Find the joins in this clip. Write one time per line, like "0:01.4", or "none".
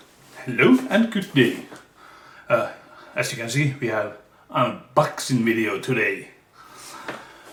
none